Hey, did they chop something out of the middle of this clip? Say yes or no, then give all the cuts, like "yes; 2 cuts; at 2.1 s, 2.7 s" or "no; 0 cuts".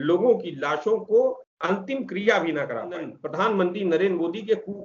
yes; 2 cuts; at 1.5 s, 3.2 s